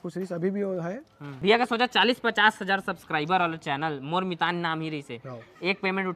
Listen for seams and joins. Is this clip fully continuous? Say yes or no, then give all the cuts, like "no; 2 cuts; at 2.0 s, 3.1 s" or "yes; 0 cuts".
no; 1 cut; at 1.4 s